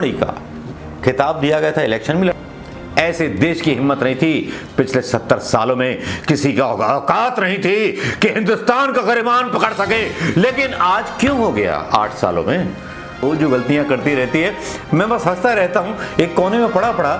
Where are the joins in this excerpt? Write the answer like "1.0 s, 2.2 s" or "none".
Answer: 2.3 s, 13.2 s